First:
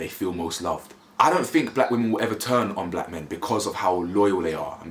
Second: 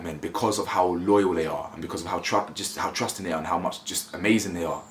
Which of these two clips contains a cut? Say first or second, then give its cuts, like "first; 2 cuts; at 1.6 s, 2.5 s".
first; 1 cut; at 1.1 s